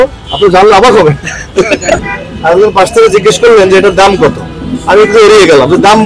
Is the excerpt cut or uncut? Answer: cut